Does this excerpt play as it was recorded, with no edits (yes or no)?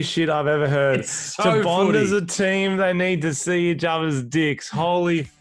yes